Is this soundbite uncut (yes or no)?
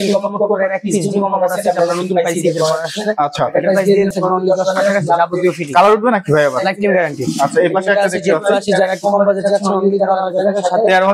no